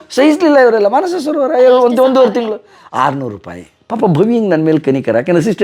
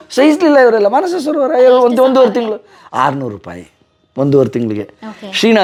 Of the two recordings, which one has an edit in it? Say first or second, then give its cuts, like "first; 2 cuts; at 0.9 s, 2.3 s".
first; 1 cut; at 3.8 s